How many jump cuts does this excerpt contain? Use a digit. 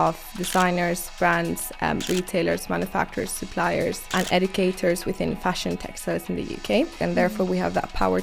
2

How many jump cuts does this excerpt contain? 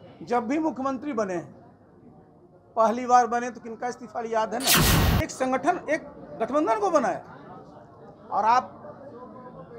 1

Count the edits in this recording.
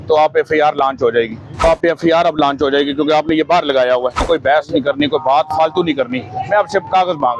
2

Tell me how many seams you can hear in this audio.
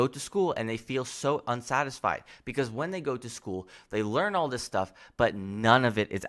0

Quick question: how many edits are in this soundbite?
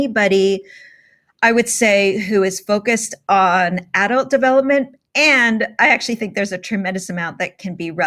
0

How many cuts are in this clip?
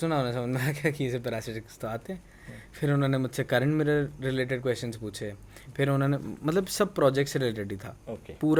0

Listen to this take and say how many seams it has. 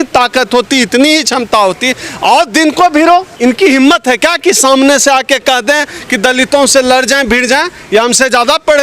1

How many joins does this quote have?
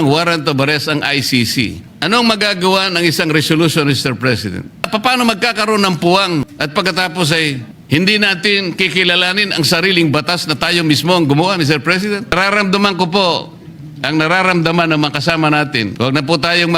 6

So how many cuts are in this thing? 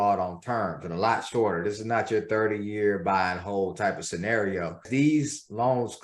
1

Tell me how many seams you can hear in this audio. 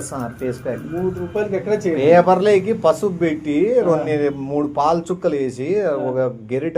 1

